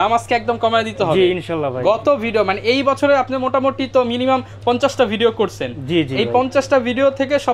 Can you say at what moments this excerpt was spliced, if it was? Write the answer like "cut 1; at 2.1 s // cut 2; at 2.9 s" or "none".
none